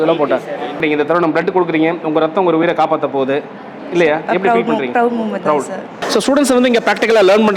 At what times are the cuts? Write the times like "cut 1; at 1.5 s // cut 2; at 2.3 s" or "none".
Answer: cut 1; at 0.8 s // cut 2; at 6.0 s